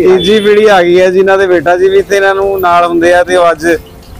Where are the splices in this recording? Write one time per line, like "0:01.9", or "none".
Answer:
none